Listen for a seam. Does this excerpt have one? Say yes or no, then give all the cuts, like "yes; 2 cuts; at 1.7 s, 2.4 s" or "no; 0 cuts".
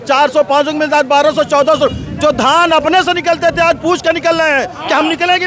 no; 0 cuts